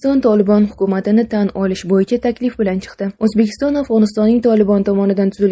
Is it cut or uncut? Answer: uncut